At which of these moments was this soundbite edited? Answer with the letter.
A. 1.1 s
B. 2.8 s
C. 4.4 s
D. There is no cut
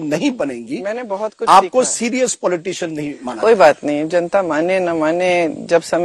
D